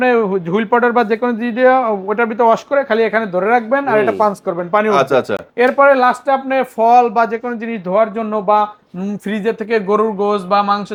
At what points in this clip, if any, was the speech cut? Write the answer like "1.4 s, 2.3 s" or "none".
none